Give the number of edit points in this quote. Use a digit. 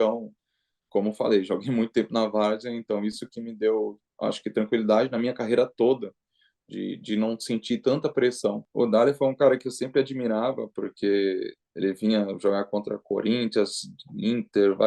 1